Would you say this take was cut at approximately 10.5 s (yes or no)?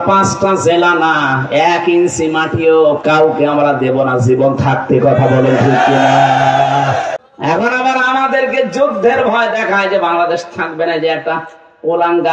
no